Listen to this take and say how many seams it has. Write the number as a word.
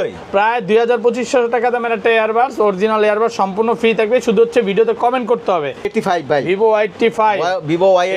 one